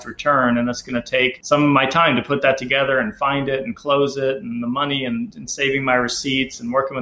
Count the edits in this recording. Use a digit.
1